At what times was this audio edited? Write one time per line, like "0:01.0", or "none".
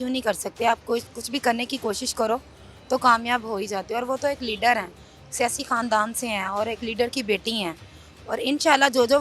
none